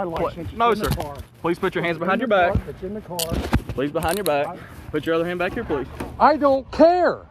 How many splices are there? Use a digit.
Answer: 1